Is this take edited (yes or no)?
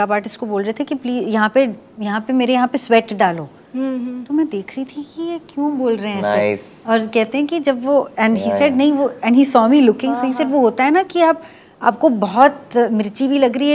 no